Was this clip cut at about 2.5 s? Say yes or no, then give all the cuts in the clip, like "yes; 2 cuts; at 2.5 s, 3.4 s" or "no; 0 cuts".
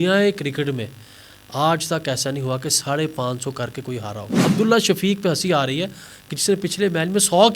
no; 1 cut; at 4.4 s